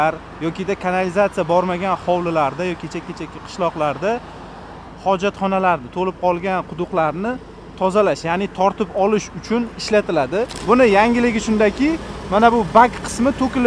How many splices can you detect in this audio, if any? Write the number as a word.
one